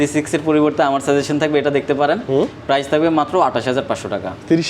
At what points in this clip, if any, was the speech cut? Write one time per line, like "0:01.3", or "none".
none